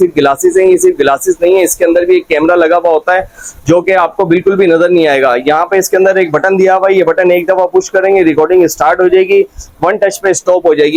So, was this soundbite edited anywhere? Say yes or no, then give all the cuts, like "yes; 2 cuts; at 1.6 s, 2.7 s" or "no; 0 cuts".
no; 0 cuts